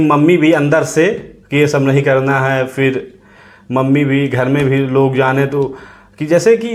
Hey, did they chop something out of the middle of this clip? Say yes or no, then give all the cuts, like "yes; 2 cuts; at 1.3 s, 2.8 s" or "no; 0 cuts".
no; 0 cuts